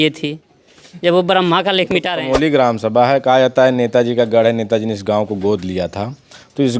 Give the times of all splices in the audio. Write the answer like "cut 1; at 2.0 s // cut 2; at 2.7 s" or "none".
cut 1; at 2.1 s

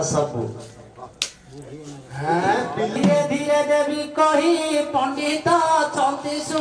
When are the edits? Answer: cut 1; at 2.9 s

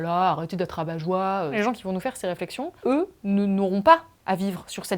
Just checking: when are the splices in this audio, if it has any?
cut 1; at 1.5 s // cut 2; at 2.7 s

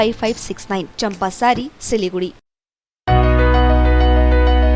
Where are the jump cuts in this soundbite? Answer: none

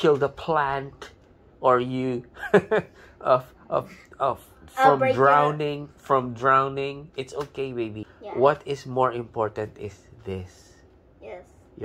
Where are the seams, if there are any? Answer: cut 1; at 8.1 s

